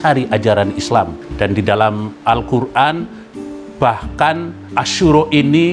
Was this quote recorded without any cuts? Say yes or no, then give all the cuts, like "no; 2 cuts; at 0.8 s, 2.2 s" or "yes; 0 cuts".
no; 2 cuts; at 1.2 s, 4.6 s